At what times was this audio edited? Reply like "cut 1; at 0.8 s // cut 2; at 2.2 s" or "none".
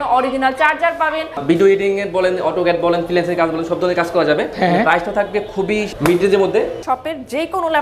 cut 1; at 1.4 s // cut 2; at 4.5 s // cut 3; at 6.8 s